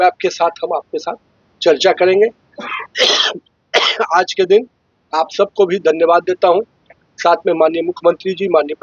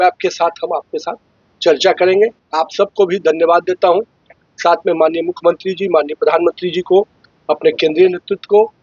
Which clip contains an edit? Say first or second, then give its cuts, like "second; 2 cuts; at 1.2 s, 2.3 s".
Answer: second; 1 cut; at 2.4 s